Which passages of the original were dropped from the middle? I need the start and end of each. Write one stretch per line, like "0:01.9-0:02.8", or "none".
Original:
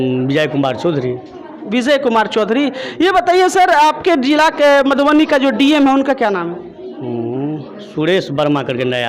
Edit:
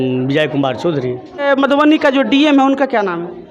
0:01.4-0:04.7